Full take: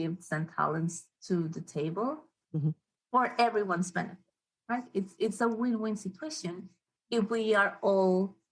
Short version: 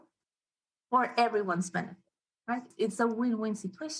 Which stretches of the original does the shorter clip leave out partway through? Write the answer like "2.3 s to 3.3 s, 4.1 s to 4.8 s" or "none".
4.9 s to 5.1 s